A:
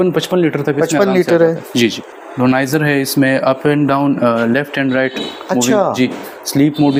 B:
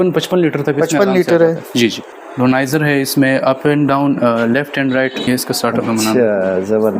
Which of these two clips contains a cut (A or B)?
B